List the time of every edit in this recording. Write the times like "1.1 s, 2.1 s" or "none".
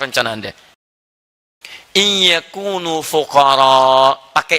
1.2 s

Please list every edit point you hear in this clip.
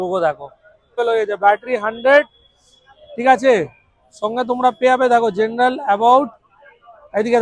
1.0 s

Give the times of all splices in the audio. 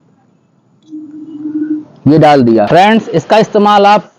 2.7 s

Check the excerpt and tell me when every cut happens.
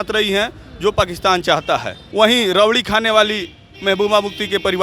2.0 s

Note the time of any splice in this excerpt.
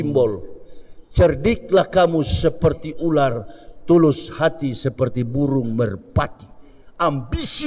none

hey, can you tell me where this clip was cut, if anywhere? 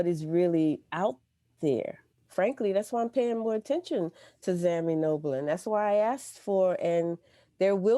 2.2 s

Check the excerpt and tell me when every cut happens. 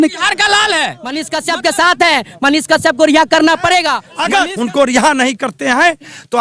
1.3 s, 4.4 s

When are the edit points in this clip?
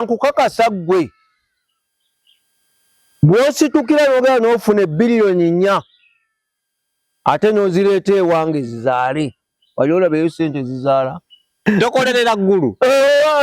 11.6 s

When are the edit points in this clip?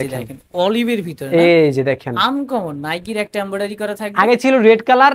none

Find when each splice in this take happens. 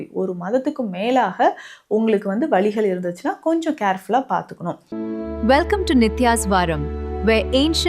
4.8 s

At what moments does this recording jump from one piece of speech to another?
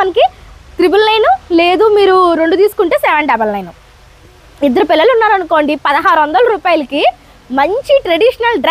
none

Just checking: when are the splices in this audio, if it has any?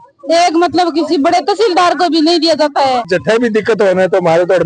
3.1 s

